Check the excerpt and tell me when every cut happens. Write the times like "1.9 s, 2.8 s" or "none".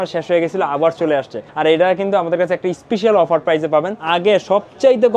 1.4 s, 4.0 s